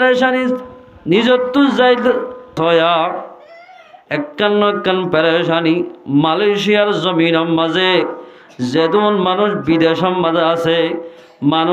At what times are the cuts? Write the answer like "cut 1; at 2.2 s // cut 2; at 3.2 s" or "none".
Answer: cut 1; at 2.6 s